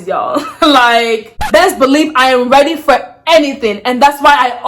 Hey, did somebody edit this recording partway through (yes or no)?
yes